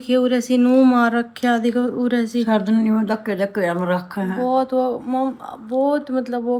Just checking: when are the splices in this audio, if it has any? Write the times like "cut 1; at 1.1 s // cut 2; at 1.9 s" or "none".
none